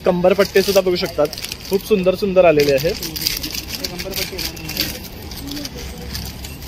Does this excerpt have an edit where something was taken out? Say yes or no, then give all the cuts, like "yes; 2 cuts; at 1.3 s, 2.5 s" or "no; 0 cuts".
no; 0 cuts